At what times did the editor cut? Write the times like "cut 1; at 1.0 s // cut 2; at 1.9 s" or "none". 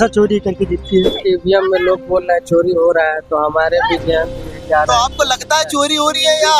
cut 1; at 1.1 s